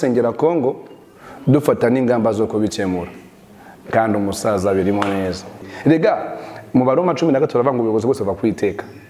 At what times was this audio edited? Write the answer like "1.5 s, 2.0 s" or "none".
5.7 s